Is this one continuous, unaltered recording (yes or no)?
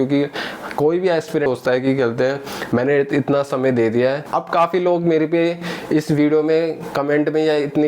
no